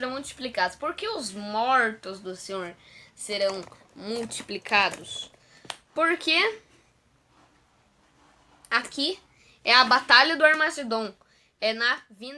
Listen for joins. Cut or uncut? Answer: uncut